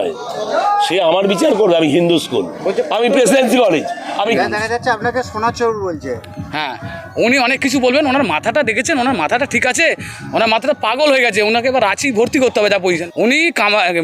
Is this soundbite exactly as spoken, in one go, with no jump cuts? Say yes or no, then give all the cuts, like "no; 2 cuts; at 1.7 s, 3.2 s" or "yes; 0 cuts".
no; 2 cuts; at 4.3 s, 13.0 s